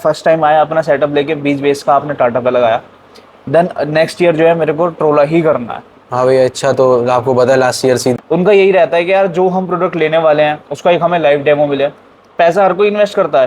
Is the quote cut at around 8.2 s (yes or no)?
yes